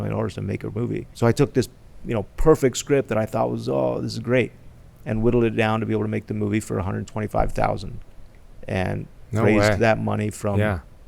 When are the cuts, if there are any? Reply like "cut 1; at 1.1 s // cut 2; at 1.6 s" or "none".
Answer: cut 1; at 1.1 s